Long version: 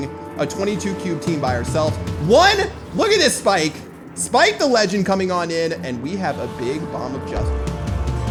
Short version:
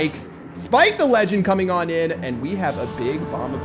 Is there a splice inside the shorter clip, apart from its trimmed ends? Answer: no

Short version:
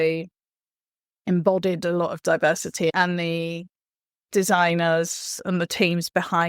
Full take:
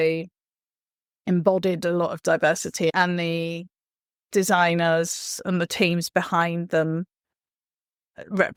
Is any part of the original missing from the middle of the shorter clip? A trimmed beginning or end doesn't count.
no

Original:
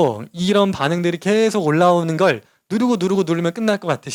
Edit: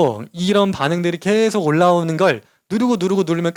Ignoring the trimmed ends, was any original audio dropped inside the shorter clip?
no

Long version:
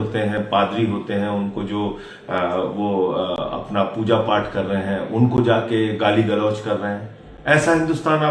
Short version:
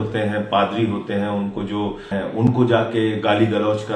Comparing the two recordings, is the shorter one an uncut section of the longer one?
no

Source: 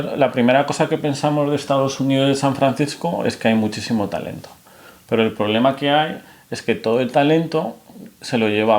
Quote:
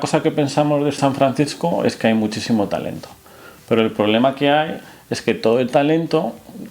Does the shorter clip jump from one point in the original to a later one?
yes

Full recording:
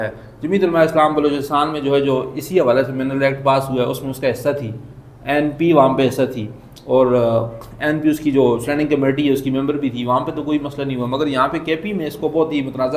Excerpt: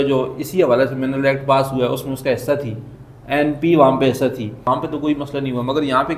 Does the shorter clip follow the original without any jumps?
no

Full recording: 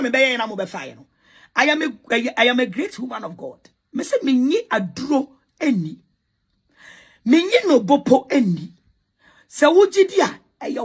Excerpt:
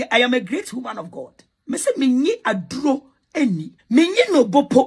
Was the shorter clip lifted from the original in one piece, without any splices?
no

